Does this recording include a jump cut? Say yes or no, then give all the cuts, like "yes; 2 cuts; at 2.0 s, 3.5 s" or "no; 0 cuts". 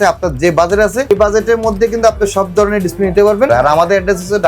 yes; 2 cuts; at 1.1 s, 3.5 s